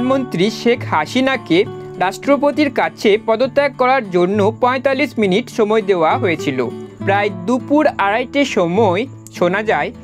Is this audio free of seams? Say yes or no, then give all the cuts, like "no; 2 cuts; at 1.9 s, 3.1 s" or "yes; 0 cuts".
no; 1 cut; at 6.9 s